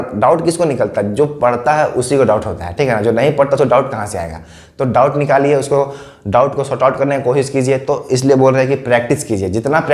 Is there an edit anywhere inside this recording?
no; 0 cuts

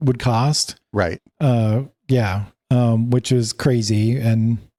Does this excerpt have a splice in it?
no; 0 cuts

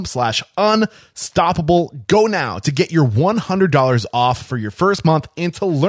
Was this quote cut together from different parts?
yes; 1 cut; at 2.0 s

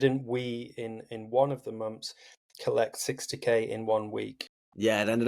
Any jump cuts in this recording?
no; 0 cuts

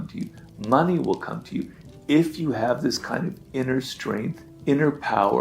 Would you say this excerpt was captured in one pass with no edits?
no; 1 cut; at 4.5 s

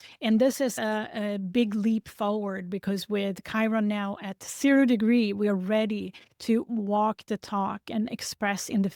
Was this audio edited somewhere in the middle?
no; 0 cuts

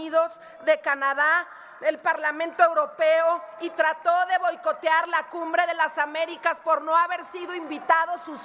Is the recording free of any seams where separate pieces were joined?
yes; 0 cuts

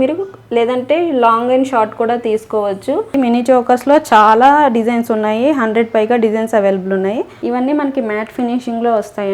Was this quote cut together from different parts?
yes; 2 cuts; at 3.1 s, 7.3 s

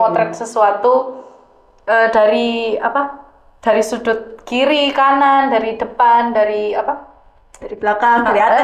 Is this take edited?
no; 0 cuts

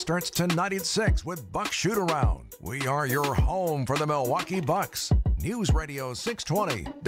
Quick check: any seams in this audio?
no; 0 cuts

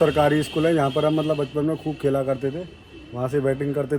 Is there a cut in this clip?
no; 0 cuts

